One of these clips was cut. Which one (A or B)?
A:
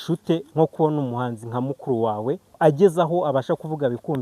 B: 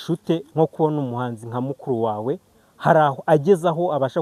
A